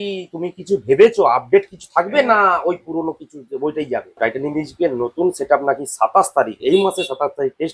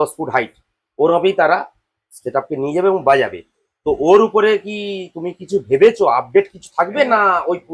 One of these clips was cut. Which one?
first; 1 cut; at 4.2 s

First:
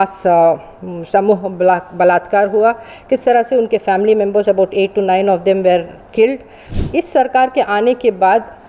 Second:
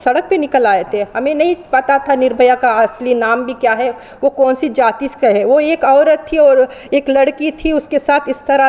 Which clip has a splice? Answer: first; 1 cut; at 6.6 s

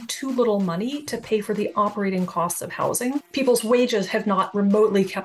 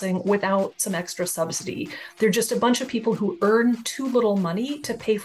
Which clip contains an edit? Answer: first; 1 cut; at 3.3 s

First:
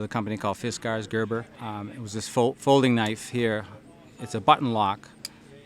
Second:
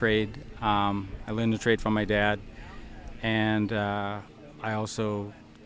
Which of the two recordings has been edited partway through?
first; 1 cut; at 1.6 s

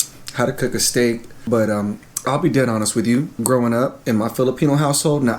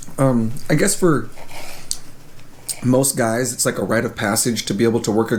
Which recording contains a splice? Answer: first; 3 cuts; at 1.3 s, 3.3 s, 4.0 s

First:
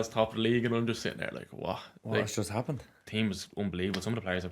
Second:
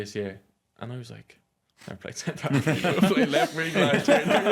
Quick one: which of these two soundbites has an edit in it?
first; 1 cut; at 2.9 s

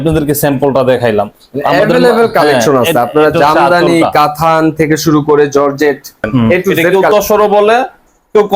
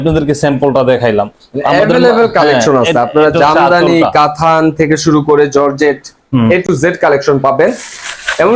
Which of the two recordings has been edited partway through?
first; 1 cut; at 6.8 s

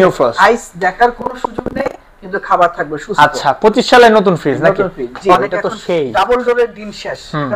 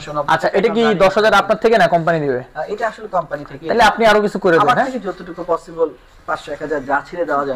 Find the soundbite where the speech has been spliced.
first; 1 cut; at 5.4 s

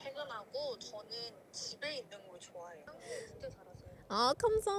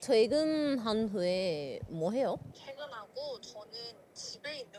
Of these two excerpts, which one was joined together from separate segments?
first; 1 cut; at 3.1 s

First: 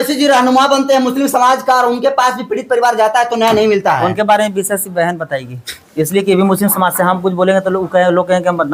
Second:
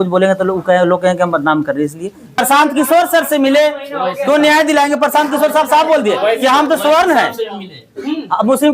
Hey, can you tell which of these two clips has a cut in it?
second; 1 cut; at 2.4 s

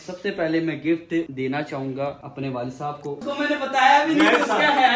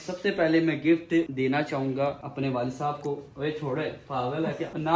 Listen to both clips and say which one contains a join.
first; 1 cut; at 3.3 s

